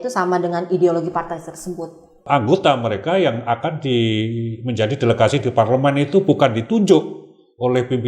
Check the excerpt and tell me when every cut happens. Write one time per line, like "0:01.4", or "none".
0:02.3